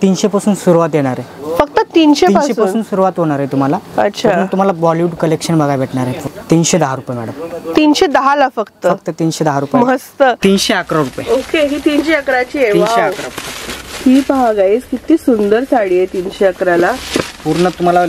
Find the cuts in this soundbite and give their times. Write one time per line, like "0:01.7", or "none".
0:06.2
0:10.4